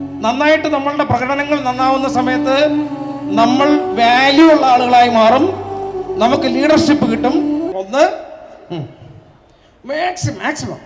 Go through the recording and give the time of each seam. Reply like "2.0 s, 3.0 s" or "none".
7.7 s